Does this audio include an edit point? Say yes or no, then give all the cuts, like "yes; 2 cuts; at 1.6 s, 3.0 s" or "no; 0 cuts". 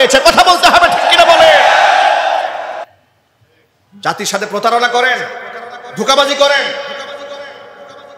no; 0 cuts